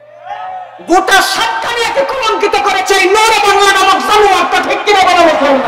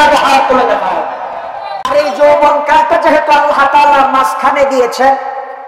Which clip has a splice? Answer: second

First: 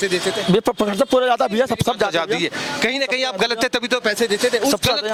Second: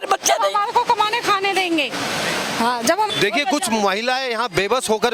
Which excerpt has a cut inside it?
second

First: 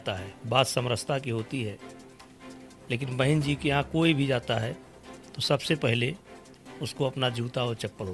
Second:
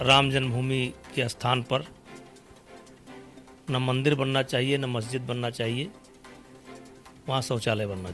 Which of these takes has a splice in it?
second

